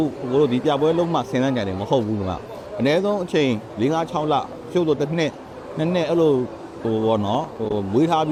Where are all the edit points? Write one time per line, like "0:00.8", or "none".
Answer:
none